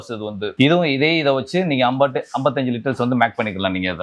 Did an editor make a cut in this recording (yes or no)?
no